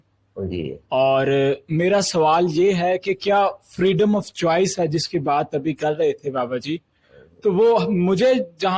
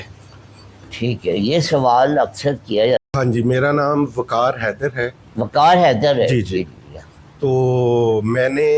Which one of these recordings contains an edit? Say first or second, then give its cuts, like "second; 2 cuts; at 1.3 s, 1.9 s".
second; 1 cut; at 3.1 s